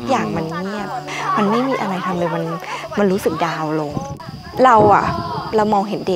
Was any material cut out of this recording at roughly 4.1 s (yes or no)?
yes